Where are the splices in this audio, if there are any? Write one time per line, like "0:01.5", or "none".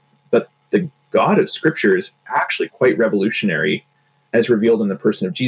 none